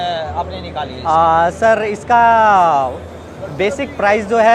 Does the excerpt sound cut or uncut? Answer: uncut